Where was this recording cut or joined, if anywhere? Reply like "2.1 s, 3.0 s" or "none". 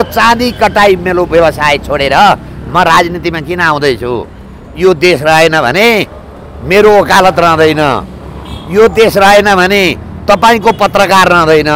none